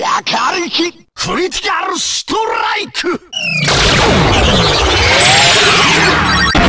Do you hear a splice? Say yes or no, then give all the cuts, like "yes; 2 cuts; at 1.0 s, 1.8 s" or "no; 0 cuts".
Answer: yes; 1 cut; at 0.9 s